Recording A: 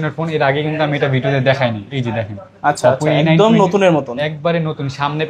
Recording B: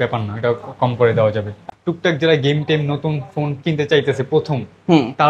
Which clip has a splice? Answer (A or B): B